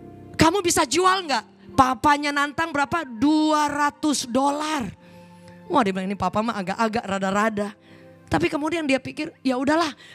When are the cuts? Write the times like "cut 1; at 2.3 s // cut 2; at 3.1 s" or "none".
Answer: none